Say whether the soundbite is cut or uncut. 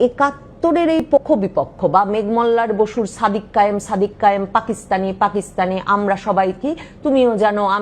cut